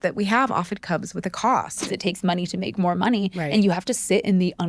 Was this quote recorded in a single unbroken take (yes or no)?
no